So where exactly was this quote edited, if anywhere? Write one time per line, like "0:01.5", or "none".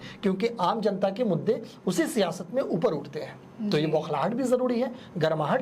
none